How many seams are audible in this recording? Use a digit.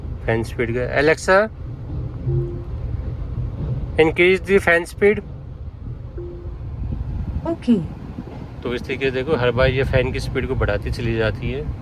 0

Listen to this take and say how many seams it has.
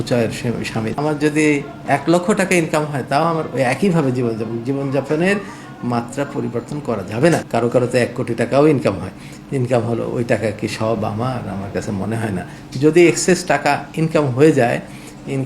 3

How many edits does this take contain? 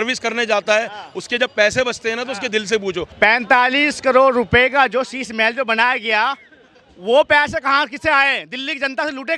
1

